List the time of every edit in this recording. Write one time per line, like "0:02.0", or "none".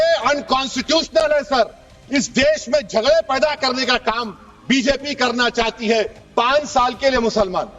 0:06.2